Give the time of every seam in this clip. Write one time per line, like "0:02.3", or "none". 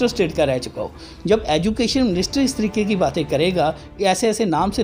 none